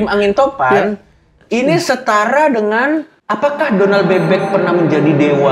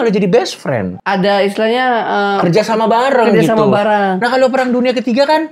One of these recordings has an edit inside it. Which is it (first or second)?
second